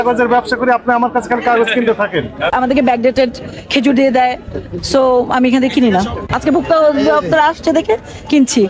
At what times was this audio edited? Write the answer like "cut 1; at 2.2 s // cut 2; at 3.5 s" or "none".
cut 1; at 2.5 s // cut 2; at 6.2 s